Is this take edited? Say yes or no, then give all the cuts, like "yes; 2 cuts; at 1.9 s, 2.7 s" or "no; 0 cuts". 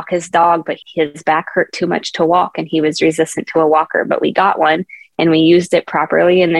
no; 0 cuts